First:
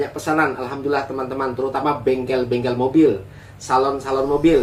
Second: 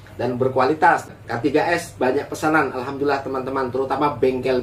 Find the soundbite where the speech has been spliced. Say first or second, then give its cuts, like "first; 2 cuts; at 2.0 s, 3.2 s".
second; 1 cut; at 1.1 s